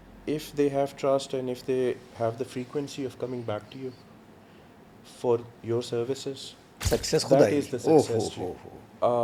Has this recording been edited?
no; 0 cuts

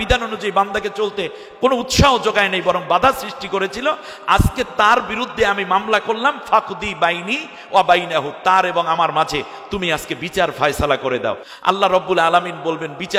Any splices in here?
no; 0 cuts

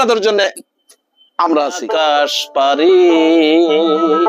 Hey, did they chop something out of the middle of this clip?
yes; 1 cut; at 1.8 s

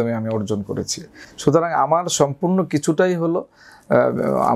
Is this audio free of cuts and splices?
yes; 0 cuts

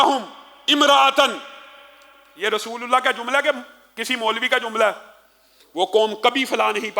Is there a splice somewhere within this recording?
no; 0 cuts

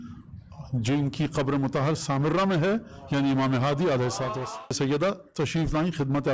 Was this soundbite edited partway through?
yes; 1 cut; at 4.6 s

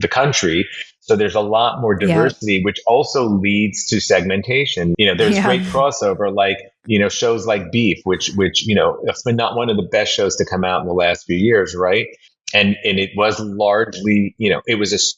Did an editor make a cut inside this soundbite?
yes; 1 cut; at 4.9 s

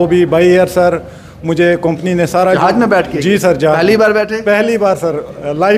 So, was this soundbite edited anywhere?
no; 0 cuts

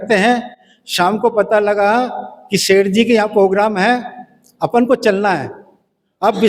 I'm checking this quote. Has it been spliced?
no; 0 cuts

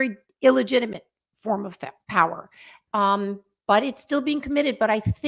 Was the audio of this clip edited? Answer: no; 0 cuts

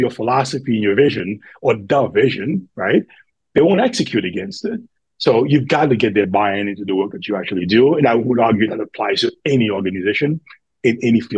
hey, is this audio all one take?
yes; 0 cuts

